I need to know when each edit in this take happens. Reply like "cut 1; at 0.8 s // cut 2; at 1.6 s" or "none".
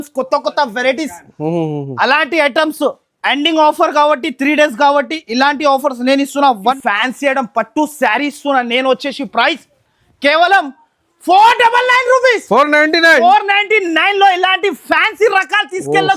cut 1; at 6.8 s